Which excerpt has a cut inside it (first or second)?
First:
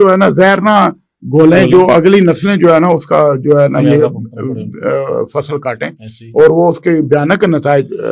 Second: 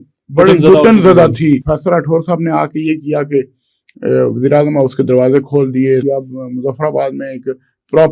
second